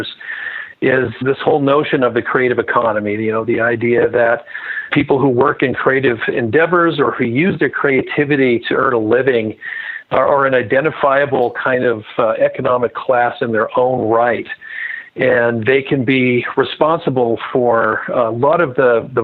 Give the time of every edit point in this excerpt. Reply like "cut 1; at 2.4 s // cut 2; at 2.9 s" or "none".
cut 1; at 1.1 s // cut 2; at 4.9 s